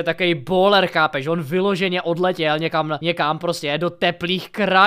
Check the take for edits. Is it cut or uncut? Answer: cut